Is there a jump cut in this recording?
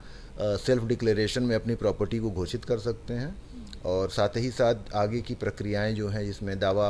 no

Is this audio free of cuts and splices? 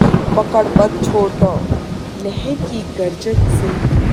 yes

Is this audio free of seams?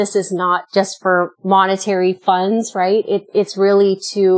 no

